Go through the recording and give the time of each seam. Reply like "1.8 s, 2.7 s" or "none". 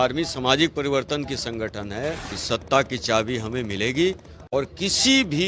2.3 s